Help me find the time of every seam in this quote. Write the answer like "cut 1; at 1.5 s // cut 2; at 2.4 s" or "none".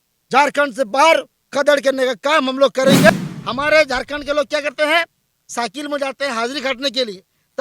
cut 1; at 3.1 s

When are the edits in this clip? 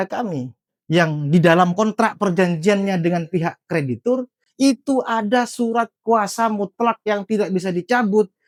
none

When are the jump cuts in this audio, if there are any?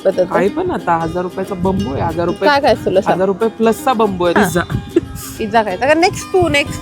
cut 1; at 4.4 s

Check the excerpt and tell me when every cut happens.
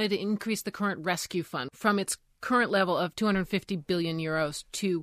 cut 1; at 1.6 s

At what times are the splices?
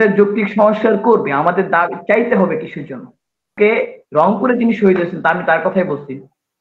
cut 1; at 3.5 s

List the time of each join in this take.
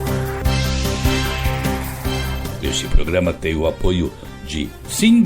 cut 1; at 1.4 s // cut 2; at 2.9 s

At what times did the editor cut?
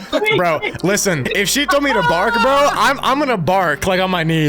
cut 1; at 1.2 s

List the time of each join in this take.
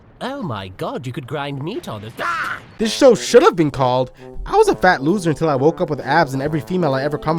cut 1; at 2.7 s

